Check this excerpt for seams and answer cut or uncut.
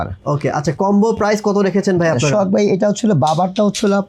uncut